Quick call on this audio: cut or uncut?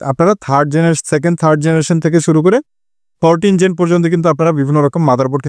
uncut